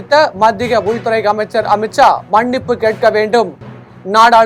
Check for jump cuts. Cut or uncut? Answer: uncut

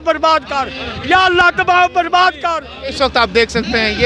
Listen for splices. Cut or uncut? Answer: cut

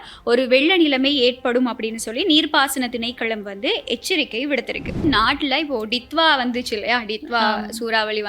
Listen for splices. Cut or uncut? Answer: cut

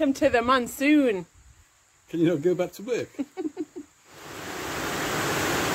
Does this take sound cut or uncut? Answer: uncut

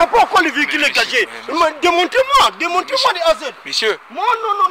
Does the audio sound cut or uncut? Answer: uncut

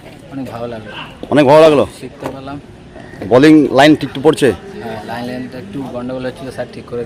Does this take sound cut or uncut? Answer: uncut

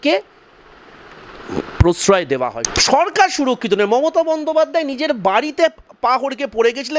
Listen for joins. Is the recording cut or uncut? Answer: cut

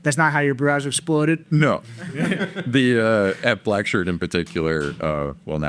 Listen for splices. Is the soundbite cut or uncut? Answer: uncut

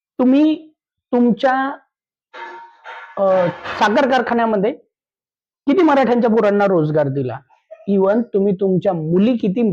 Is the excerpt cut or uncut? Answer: uncut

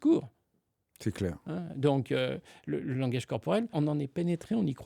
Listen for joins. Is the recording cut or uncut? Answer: cut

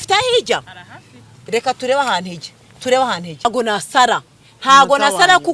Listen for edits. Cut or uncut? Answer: cut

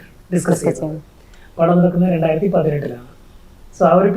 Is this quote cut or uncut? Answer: uncut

